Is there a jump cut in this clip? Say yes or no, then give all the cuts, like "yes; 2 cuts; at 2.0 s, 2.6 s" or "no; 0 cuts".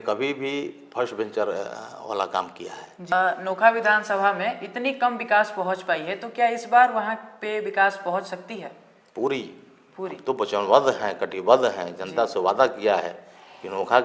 yes; 1 cut; at 3.1 s